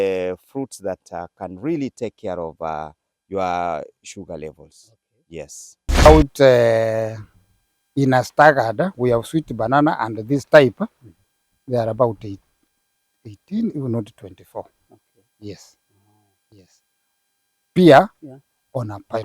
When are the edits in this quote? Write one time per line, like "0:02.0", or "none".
0:06.1